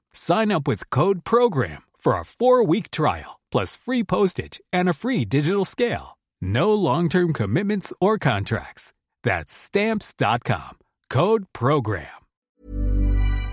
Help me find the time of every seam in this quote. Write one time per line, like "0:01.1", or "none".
0:12.5